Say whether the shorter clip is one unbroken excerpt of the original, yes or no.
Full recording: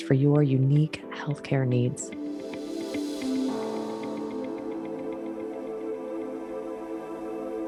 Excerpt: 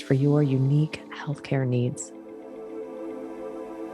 no